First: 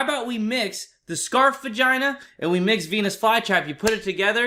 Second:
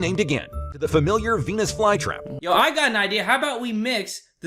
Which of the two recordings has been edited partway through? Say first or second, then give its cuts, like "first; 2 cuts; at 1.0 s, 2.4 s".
second; 2 cuts; at 0.9 s, 2.3 s